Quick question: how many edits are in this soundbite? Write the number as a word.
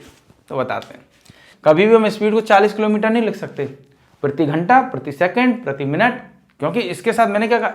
one